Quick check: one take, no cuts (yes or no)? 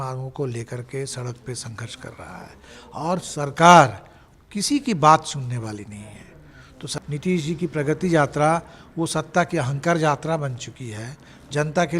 no